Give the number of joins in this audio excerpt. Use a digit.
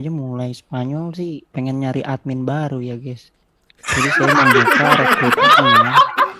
1